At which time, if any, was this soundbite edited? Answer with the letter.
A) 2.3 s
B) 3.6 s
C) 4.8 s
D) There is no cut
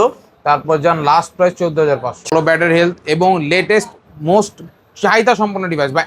A